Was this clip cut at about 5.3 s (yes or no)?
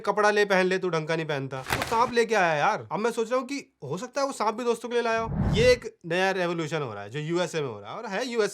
yes